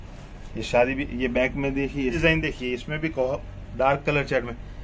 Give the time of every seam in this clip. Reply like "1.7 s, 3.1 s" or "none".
2.2 s